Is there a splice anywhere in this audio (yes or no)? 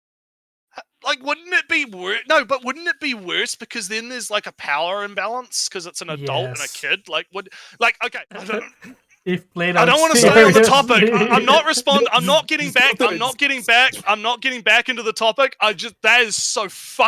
yes